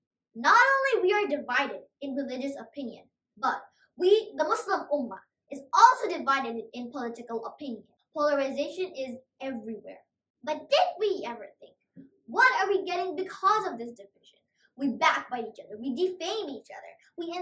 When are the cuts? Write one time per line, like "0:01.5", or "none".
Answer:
0:07.9